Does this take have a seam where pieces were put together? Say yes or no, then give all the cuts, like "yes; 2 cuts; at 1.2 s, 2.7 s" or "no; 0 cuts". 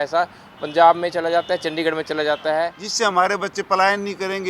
yes; 1 cut; at 2.8 s